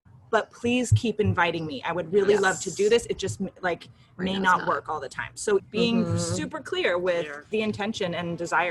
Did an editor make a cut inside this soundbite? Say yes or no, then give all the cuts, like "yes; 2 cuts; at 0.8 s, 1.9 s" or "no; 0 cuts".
yes; 2 cuts; at 5.6 s, 7.4 s